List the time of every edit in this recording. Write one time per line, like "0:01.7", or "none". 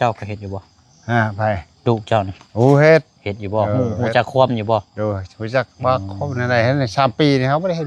none